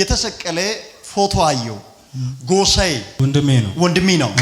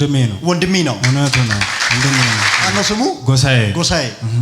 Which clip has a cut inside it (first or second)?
second